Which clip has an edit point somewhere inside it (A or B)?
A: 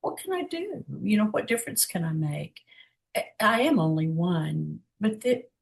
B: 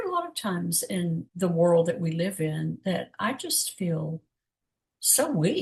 A